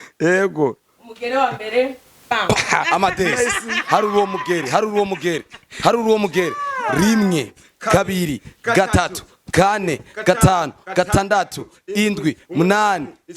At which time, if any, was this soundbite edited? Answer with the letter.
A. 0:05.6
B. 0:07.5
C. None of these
C